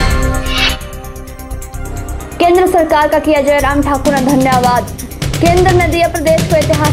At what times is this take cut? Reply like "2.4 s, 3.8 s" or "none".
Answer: none